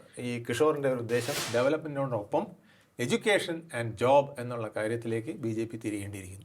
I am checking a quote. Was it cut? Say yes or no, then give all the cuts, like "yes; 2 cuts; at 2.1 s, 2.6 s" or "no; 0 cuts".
yes; 1 cut; at 1.4 s